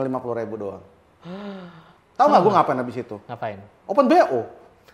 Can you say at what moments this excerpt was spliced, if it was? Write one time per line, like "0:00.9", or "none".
none

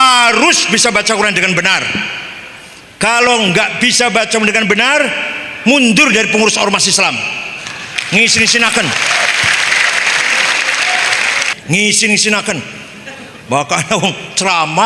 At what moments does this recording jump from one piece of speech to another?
0:11.5

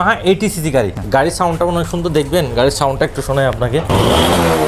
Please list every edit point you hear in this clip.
0:01.0

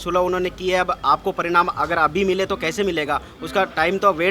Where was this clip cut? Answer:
none

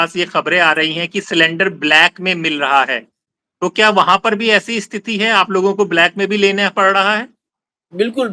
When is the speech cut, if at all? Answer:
none

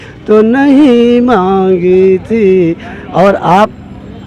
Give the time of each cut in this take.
none

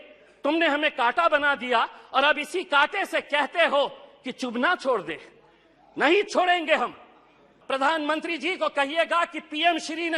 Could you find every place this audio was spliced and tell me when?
0:07.5

